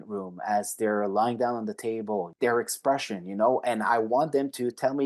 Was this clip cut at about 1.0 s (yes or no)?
no